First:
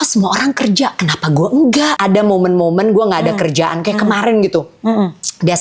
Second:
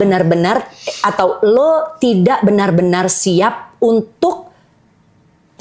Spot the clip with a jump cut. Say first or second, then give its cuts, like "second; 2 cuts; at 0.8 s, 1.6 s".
first; 1 cut; at 1.9 s